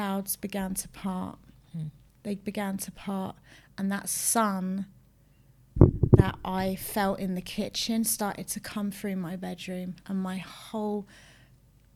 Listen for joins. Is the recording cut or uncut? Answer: uncut